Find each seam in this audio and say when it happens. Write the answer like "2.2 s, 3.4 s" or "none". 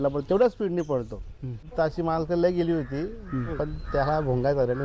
1.7 s